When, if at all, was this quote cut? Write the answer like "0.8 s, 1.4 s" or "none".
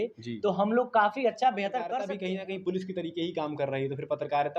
1.9 s